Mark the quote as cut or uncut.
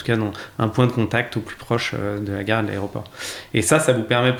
uncut